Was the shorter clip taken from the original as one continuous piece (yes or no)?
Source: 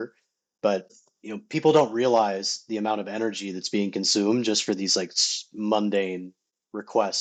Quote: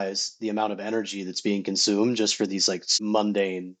no